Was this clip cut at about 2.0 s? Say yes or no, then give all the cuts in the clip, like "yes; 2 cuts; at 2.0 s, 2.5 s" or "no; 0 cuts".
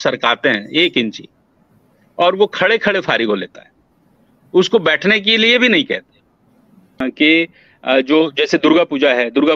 no; 1 cut; at 7.0 s